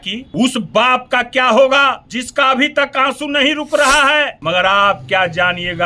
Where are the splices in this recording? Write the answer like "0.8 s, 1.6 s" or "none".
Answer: 4.3 s